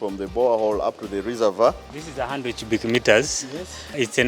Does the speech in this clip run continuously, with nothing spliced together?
no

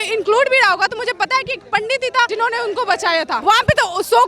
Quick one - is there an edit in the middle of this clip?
yes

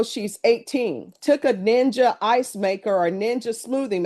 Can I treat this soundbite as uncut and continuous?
no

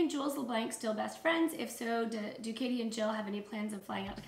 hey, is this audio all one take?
yes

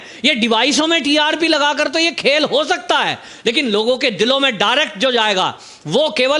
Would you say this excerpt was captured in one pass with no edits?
yes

